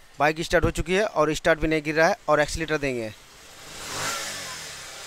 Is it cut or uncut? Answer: uncut